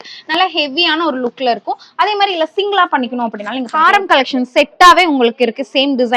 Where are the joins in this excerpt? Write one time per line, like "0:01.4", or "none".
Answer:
0:03.7